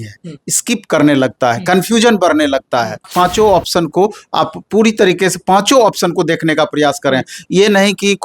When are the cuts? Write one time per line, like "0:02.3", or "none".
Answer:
0:03.1